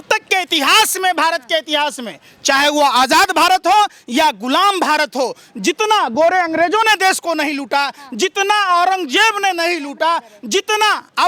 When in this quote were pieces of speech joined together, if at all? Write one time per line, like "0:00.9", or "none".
none

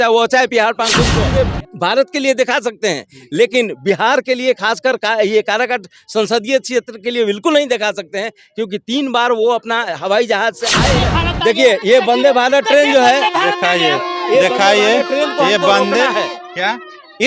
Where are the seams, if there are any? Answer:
0:01.1
0:11.0

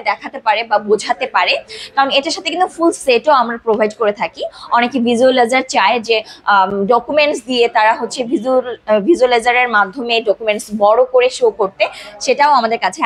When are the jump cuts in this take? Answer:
none

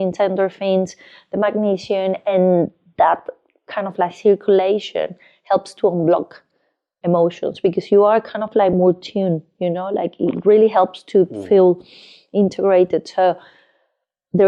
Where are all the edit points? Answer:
none

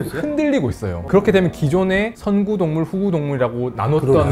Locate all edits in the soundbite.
0:01.0

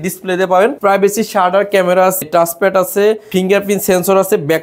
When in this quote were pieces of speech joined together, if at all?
0:00.8
0:02.2
0:03.2

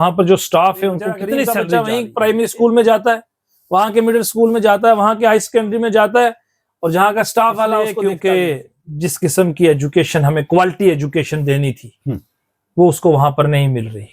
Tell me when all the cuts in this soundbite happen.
0:01.6
0:07.9

